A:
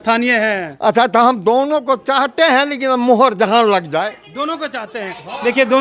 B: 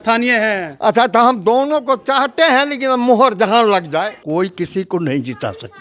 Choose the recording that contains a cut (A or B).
B